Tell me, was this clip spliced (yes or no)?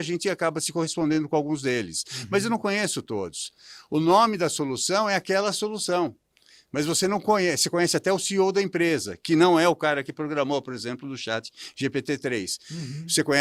no